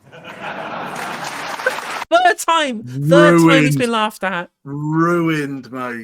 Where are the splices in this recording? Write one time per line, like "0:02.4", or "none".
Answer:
none